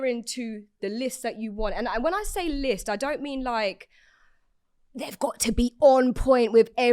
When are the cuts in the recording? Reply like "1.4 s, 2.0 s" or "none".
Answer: none